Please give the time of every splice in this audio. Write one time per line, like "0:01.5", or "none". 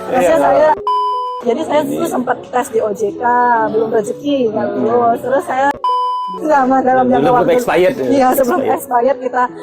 0:01.1
0:06.4